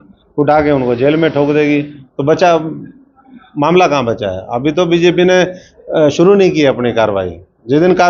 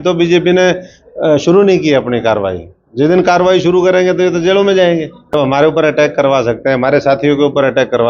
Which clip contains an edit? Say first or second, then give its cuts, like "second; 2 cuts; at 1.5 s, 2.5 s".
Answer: second; 1 cut; at 5.3 s